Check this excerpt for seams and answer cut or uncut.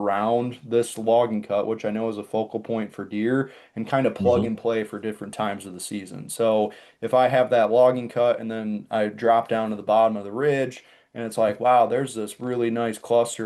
uncut